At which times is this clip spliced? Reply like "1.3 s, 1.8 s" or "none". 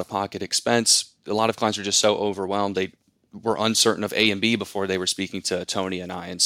1.2 s